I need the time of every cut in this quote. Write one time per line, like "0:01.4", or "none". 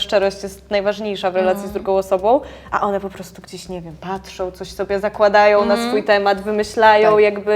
0:04.5